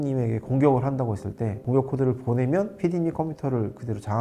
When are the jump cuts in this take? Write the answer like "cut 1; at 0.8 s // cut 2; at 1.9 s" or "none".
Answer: cut 1; at 1.6 s